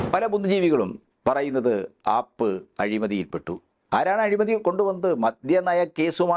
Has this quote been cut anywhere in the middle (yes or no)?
no